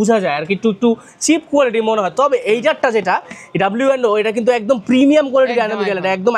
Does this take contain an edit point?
no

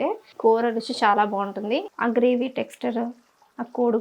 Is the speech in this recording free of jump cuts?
no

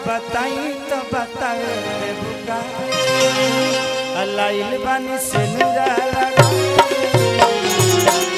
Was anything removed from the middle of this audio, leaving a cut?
no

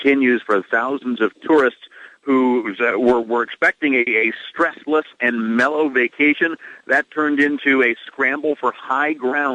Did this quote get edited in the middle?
no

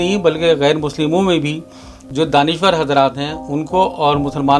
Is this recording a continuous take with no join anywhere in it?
yes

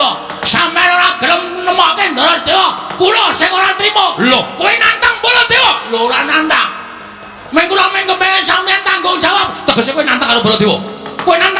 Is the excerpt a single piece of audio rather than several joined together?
yes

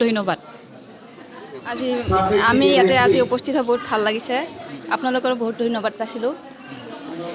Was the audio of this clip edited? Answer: no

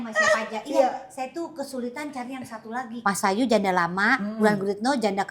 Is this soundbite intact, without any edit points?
no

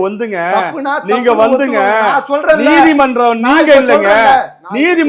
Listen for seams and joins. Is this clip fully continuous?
yes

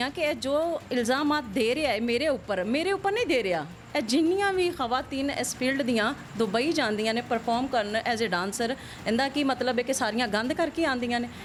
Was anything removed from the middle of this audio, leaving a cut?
no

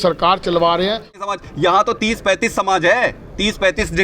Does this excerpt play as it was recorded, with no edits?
no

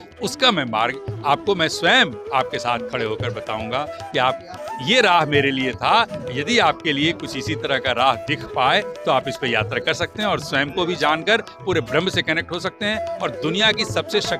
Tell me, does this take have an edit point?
no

